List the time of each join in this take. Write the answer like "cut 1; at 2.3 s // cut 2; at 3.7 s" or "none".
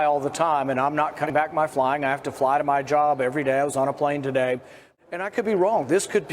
cut 1; at 1.2 s // cut 2; at 4.8 s